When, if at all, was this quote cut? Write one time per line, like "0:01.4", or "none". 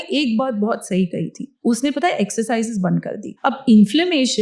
0:01.4
0:03.4